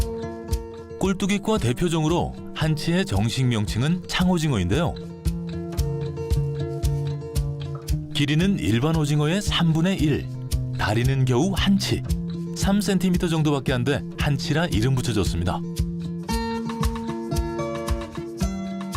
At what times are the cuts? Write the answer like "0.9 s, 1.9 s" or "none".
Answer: 15.5 s